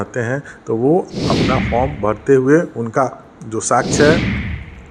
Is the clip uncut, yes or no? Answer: yes